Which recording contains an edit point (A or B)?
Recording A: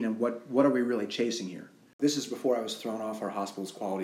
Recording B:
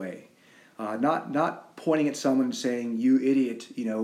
A